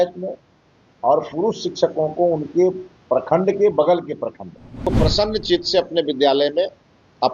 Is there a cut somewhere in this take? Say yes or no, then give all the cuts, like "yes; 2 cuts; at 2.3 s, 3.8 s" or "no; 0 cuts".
yes; 1 cut; at 4.9 s